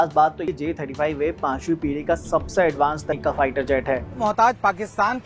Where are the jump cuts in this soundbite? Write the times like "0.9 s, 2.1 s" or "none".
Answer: 4.1 s